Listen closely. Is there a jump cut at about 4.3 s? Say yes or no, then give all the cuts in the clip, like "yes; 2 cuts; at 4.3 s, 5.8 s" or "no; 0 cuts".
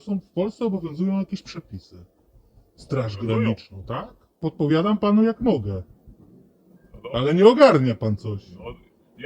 yes; 1 cut; at 4.3 s